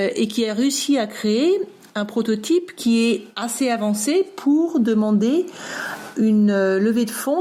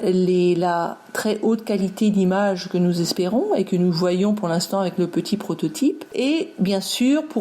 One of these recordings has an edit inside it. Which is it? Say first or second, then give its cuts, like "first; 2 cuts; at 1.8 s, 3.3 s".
second; 1 cut; at 6.1 s